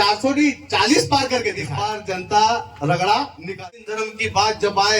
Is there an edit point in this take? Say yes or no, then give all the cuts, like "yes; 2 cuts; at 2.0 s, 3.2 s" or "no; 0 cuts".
yes; 2 cuts; at 1.7 s, 3.6 s